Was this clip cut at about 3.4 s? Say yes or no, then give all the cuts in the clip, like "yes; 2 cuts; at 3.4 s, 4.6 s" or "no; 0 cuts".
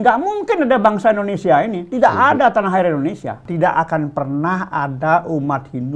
yes; 1 cut; at 3.4 s